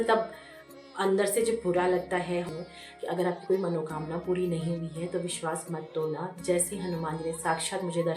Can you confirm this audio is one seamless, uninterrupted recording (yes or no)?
no